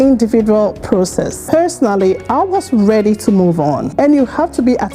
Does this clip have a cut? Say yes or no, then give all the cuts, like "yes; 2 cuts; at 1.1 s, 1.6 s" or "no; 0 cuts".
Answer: yes; 2 cuts; at 1.4 s, 3.9 s